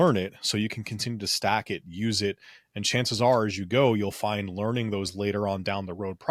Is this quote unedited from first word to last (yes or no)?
yes